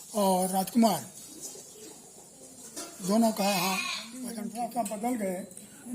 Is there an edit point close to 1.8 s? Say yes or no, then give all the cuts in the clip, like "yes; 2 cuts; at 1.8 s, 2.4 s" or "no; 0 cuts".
no; 1 cut; at 4.3 s